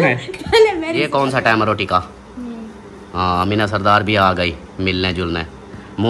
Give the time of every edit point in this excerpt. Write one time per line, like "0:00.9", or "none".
0:01.1